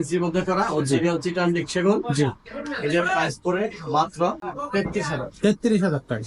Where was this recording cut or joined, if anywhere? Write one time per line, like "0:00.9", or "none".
0:04.5